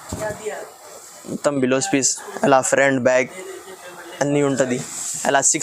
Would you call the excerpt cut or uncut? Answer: uncut